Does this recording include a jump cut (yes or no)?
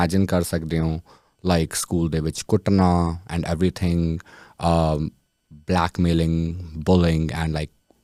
no